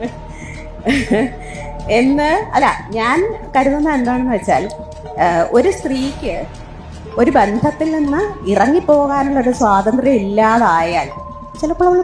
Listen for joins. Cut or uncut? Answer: uncut